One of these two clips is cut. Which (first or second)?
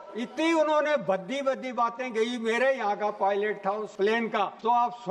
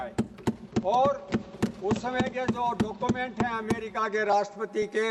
first